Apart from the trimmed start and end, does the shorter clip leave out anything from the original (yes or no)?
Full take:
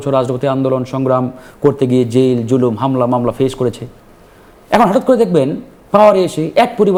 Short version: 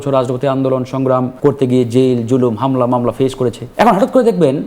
yes